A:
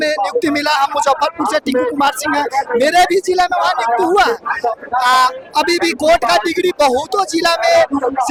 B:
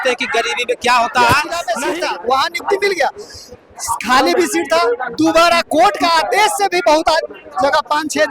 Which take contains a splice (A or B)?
B